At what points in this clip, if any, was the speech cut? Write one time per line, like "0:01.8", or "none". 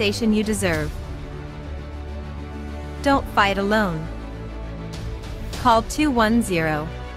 none